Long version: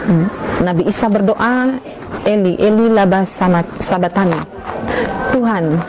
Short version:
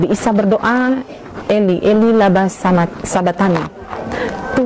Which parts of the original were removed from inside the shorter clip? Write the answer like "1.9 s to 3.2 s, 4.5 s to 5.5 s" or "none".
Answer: none